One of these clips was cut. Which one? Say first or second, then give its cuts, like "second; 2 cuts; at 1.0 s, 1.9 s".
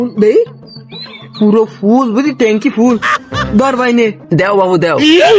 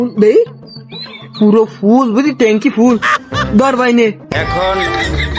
second; 1 cut; at 4.2 s